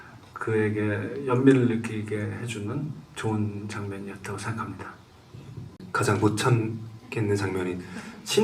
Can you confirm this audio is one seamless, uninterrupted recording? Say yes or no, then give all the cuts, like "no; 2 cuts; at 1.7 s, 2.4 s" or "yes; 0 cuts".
no; 1 cut; at 5.8 s